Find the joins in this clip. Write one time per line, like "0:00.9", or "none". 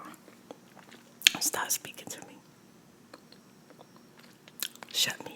none